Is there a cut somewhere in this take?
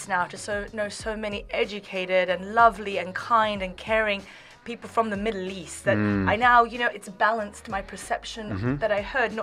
no; 0 cuts

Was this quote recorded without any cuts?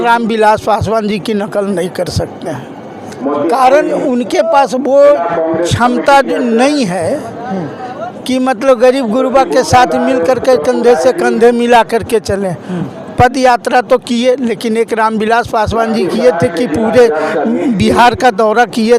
yes; 0 cuts

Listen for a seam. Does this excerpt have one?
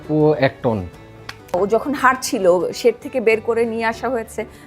yes; 1 cut; at 1.4 s

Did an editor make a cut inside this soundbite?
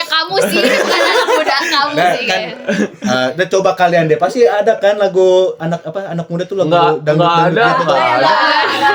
no; 0 cuts

